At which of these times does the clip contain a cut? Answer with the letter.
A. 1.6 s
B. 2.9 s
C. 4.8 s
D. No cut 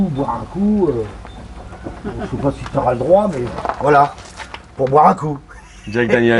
D